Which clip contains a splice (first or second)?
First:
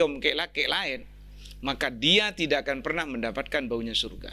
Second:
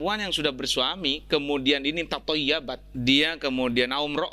second